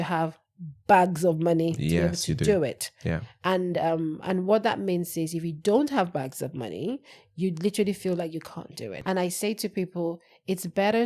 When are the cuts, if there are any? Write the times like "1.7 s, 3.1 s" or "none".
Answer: 9.0 s